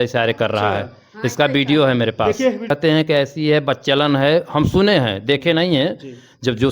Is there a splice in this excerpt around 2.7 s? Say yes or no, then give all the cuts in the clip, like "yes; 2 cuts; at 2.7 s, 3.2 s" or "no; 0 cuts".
yes; 1 cut; at 2.7 s